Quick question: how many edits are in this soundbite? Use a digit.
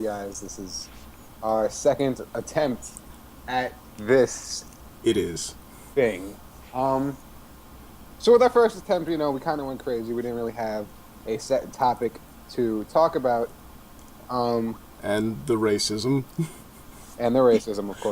1